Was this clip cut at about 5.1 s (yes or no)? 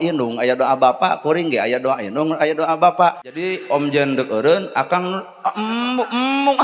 no